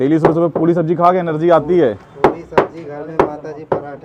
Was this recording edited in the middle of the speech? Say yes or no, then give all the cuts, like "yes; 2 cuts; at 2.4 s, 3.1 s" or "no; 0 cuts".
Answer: no; 0 cuts